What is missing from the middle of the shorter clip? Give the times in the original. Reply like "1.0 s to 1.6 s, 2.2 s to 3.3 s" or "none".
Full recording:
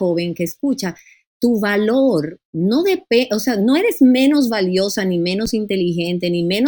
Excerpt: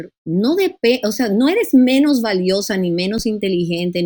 none